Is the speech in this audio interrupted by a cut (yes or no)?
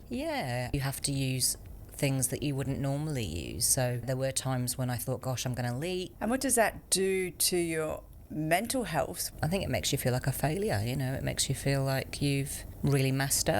yes